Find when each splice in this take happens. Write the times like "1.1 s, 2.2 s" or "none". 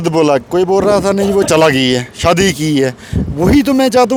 none